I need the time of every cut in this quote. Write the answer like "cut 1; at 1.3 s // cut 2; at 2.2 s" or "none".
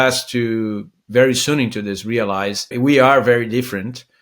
cut 1; at 2.7 s